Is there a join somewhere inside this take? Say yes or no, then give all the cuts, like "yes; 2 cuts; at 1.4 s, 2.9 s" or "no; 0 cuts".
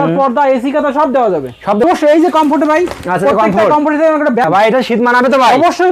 yes; 2 cuts; at 1.8 s, 4.4 s